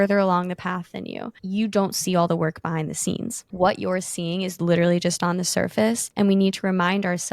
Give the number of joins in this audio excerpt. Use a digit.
3